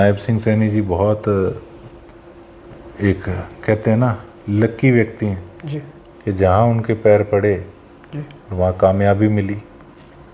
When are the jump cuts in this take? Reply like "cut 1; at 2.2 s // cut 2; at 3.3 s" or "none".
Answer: none